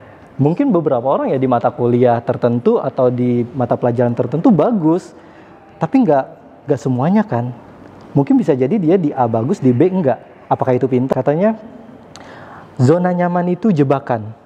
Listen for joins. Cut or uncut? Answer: cut